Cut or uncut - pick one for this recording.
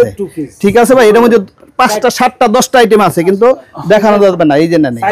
uncut